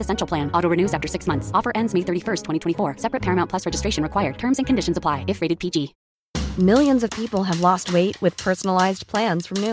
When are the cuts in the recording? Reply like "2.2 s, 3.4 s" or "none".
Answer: none